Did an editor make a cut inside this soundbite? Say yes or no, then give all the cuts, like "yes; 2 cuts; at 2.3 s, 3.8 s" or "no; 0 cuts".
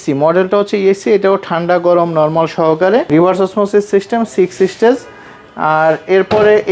yes; 1 cut; at 3.1 s